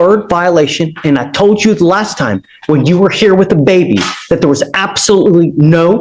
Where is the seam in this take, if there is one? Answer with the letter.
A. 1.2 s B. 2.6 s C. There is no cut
C